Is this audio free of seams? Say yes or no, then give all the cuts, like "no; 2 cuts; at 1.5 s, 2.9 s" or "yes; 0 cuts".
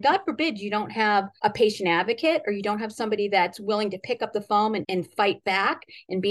no; 1 cut; at 1.3 s